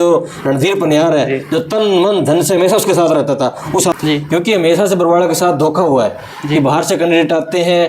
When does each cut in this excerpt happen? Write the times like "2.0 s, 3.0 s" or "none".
3.9 s